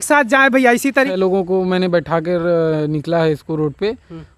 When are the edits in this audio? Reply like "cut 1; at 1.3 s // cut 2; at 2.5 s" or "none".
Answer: cut 1; at 1.2 s